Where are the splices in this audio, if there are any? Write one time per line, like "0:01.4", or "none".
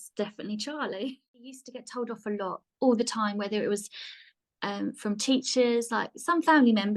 0:01.7